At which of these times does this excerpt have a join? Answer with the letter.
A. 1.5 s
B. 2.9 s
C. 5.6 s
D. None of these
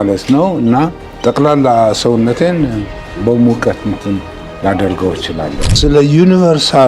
C